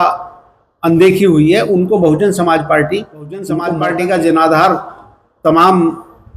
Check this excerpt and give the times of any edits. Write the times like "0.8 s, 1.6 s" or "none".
3.7 s